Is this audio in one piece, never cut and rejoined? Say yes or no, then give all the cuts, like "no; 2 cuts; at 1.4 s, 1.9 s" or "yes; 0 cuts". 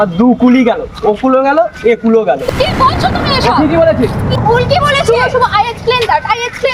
yes; 0 cuts